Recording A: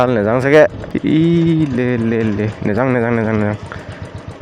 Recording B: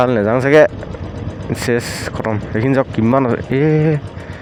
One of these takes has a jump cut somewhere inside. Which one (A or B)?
A